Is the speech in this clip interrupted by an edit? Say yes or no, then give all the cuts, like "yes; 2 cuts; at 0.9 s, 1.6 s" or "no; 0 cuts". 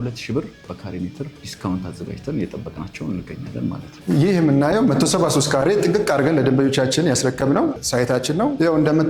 yes; 1 cut; at 3.9 s